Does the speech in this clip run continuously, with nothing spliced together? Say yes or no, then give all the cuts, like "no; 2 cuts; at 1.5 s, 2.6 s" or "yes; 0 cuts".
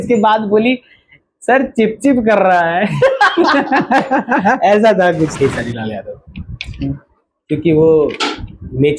no; 1 cut; at 5.3 s